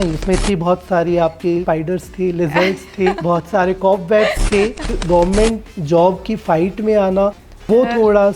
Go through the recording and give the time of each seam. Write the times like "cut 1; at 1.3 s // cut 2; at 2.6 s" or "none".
cut 1; at 1.6 s // cut 2; at 3.2 s // cut 3; at 5.0 s